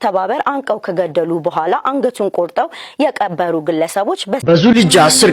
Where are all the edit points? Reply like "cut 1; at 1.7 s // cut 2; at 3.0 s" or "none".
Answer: cut 1; at 4.4 s